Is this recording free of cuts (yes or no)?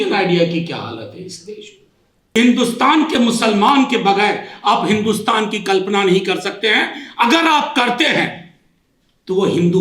no